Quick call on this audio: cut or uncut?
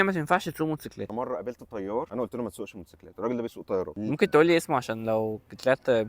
cut